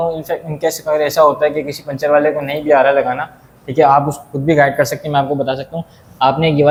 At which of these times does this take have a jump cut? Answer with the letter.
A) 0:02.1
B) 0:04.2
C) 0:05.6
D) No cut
D